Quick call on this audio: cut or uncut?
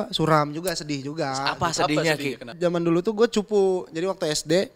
cut